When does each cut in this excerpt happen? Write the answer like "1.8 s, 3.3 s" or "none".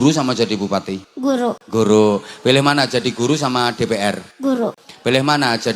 1.4 s, 4.6 s